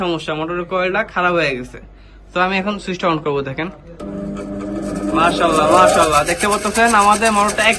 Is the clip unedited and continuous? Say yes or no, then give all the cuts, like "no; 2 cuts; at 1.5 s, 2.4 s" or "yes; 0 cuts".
yes; 0 cuts